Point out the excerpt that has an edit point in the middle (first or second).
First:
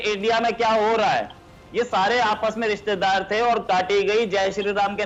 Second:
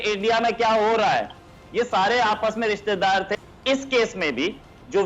second